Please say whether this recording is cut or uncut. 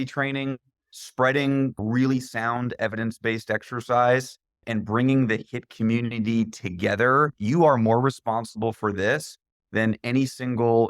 cut